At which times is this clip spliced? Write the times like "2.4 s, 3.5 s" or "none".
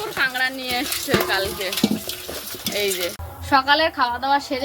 3.3 s